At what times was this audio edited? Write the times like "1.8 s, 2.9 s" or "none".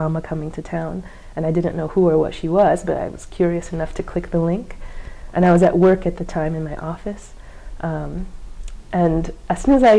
none